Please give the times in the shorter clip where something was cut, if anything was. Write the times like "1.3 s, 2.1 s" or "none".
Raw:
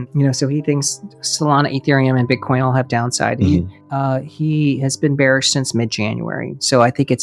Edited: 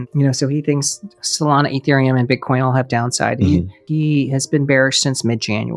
3.8 s